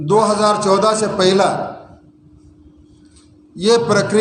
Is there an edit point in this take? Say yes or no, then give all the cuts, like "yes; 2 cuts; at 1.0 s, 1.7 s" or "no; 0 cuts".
no; 0 cuts